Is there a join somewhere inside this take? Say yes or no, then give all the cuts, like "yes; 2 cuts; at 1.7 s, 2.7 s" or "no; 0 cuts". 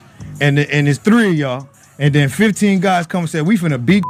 no; 0 cuts